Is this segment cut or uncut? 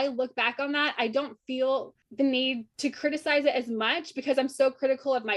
cut